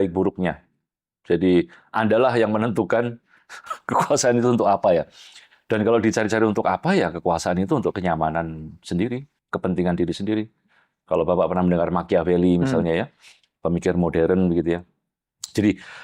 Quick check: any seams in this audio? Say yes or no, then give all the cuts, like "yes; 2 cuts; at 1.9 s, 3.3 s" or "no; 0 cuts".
no; 0 cuts